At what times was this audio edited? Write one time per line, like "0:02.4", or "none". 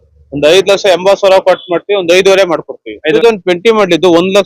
0:03.1